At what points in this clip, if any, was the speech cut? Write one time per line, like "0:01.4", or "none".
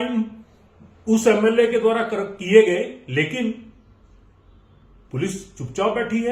none